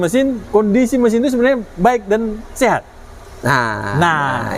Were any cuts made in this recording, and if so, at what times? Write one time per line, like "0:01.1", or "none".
none